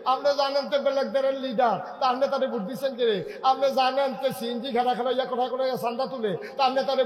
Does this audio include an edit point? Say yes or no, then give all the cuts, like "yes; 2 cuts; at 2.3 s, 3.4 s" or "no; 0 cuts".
no; 0 cuts